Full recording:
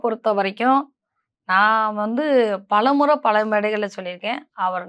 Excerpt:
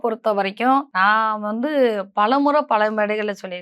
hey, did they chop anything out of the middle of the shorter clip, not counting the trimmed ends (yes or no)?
yes